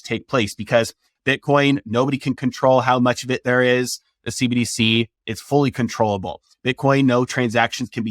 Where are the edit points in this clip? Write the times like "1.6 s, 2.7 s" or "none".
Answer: 1.0 s